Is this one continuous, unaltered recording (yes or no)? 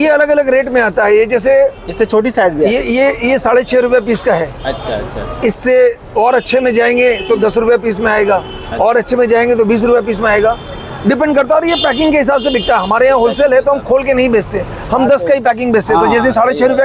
yes